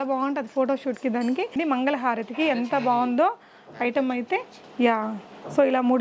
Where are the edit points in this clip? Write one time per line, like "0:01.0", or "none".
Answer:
0:01.5